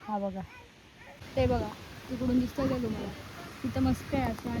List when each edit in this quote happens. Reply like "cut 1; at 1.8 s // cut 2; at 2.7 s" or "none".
cut 1; at 1.3 s